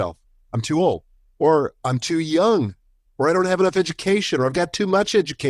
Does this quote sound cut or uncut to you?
uncut